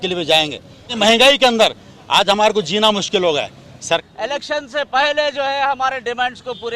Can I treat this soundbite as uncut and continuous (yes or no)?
no